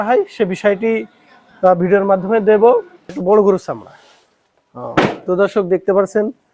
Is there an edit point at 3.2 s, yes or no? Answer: yes